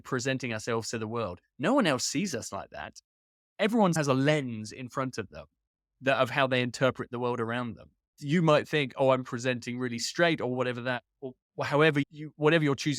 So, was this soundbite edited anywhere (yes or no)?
no